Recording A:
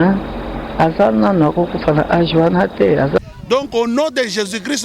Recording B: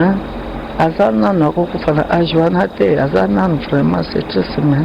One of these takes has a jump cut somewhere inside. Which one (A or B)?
A